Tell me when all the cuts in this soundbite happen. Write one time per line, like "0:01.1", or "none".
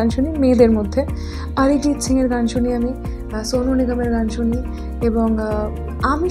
none